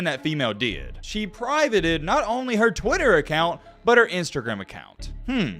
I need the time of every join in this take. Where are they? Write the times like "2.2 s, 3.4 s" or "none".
1.0 s